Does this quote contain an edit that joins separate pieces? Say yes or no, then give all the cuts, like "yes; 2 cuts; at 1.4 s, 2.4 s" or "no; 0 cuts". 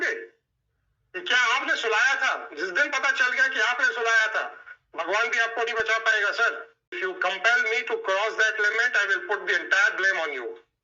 yes; 1 cut; at 7.0 s